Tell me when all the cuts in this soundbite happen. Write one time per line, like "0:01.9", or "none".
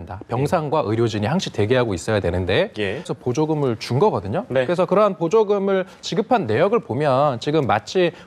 0:03.1